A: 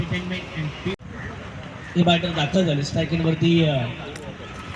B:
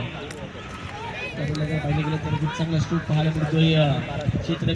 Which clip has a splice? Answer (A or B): A